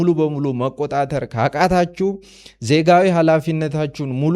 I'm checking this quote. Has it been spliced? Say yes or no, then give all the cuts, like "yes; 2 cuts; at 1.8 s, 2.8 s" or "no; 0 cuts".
no; 0 cuts